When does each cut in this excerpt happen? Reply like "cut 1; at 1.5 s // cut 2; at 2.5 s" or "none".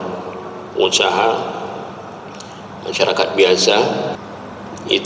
cut 1; at 4.2 s